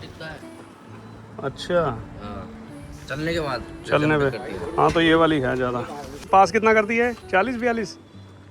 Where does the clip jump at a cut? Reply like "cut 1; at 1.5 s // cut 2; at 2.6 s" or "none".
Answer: cut 1; at 6.3 s